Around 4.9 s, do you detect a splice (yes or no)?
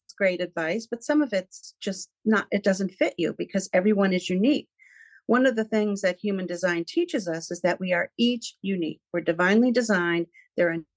no